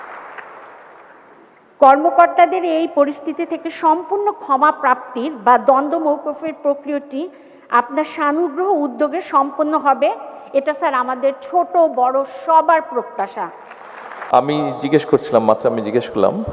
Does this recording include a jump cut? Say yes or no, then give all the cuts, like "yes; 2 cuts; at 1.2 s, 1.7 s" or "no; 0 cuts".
yes; 1 cut; at 14.3 s